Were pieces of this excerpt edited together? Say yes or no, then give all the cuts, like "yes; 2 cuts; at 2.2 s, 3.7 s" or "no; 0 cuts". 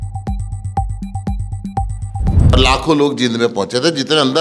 yes; 1 cut; at 2.5 s